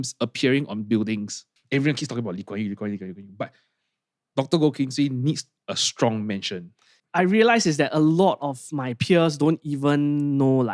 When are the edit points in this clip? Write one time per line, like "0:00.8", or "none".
0:01.5
0:06.9